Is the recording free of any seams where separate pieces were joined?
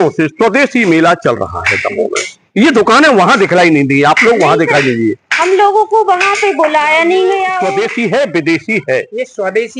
no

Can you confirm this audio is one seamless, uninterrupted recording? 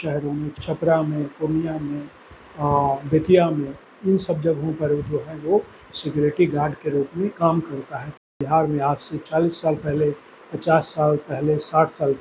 no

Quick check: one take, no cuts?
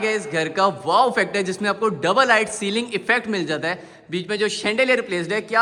yes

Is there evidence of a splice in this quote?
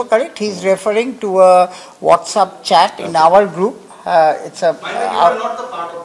no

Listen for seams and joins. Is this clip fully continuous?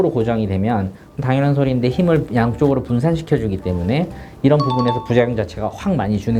yes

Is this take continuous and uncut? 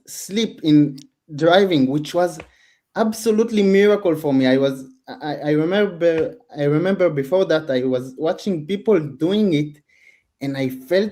yes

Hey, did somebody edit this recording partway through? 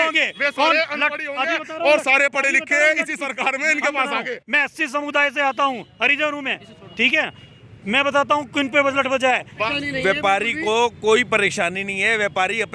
yes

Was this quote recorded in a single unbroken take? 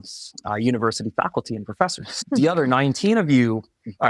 no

